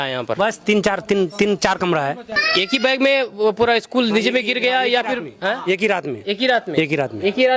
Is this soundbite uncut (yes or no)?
no